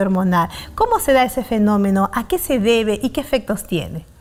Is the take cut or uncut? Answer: uncut